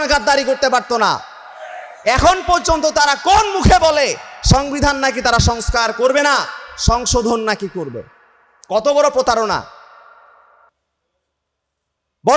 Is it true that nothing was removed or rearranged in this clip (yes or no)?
yes